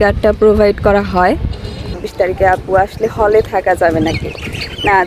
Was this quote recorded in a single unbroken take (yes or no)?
no